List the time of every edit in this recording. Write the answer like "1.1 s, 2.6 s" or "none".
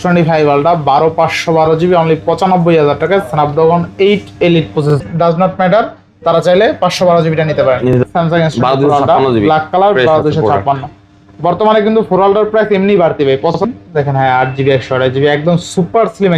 4.9 s, 8.0 s, 13.6 s